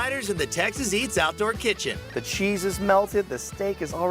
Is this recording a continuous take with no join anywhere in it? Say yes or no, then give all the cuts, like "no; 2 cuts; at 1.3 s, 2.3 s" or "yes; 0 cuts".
yes; 0 cuts